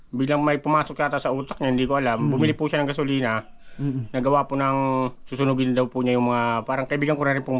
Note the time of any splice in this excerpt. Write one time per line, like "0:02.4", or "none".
none